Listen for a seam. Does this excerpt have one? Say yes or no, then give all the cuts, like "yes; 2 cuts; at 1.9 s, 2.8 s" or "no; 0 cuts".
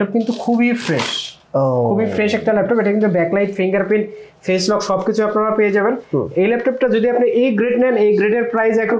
no; 0 cuts